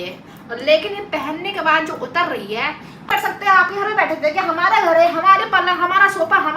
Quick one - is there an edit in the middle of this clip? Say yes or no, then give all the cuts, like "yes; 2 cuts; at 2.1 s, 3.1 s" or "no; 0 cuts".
yes; 1 cut; at 3.0 s